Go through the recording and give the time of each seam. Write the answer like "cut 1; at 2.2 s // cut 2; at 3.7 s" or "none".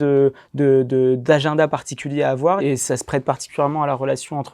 cut 1; at 2.6 s